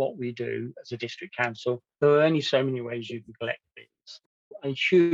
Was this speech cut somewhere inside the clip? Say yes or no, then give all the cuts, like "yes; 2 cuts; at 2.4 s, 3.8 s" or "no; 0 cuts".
yes; 1 cut; at 4.2 s